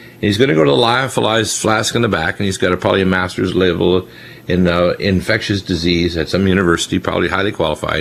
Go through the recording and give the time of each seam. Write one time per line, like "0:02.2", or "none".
none